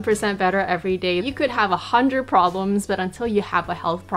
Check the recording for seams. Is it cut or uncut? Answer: cut